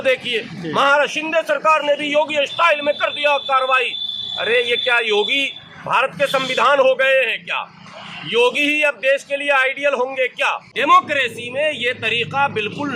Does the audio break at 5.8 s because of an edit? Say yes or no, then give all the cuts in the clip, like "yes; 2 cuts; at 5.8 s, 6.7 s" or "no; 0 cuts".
no; 1 cut; at 10.6 s